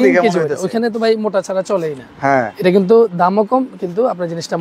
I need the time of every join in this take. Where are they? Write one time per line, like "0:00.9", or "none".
none